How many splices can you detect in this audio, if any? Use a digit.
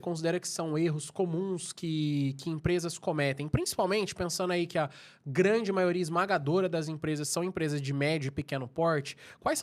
0